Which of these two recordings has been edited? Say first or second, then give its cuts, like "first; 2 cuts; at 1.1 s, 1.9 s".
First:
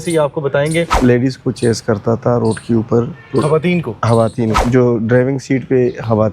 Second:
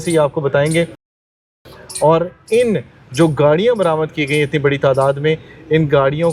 first; 2 cuts; at 0.9 s, 4.6 s